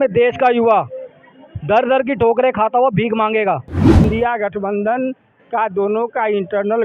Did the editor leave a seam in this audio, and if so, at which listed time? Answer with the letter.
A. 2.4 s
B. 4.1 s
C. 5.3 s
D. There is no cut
B